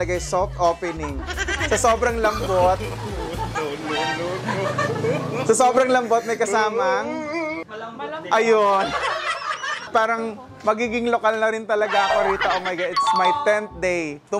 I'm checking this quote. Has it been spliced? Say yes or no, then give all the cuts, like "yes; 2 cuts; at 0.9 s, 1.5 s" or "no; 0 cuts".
yes; 1 cut; at 9.9 s